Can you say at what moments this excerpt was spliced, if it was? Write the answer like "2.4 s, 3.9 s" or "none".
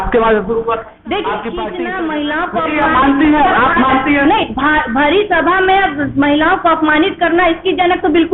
1.6 s